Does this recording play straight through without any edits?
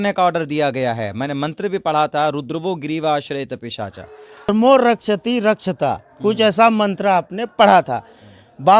no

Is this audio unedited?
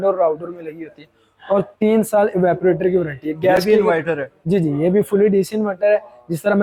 yes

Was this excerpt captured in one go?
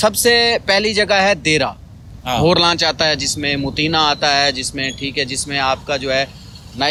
yes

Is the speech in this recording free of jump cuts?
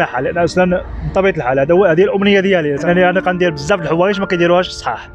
no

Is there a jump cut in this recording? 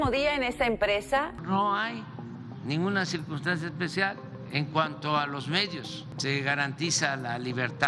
yes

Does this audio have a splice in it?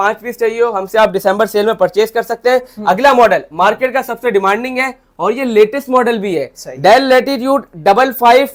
no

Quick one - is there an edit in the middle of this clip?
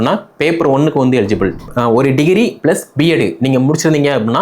yes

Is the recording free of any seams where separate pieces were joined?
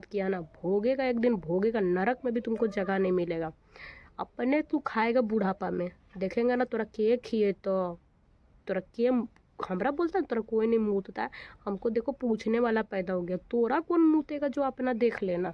yes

